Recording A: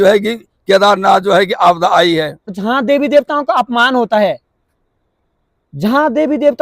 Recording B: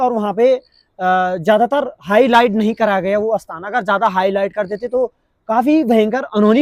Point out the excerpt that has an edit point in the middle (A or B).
A